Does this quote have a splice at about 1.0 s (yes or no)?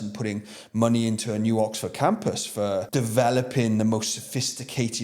no